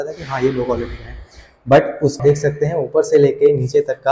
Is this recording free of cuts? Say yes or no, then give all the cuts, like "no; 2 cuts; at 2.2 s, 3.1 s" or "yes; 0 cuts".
no; 1 cut; at 2.2 s